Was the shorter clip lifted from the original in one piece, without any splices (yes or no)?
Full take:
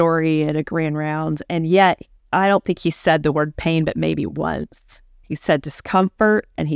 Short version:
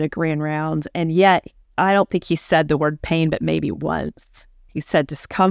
yes